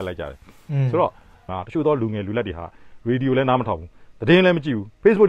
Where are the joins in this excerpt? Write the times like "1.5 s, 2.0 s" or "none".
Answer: 1.5 s